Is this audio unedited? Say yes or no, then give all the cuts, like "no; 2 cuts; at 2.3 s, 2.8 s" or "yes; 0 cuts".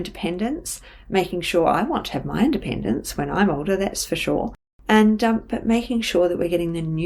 yes; 0 cuts